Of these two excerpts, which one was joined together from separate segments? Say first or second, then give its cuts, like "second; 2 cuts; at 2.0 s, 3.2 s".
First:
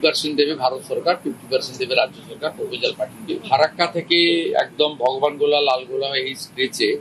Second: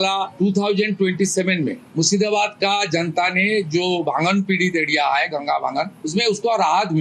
first; 1 cut; at 3.2 s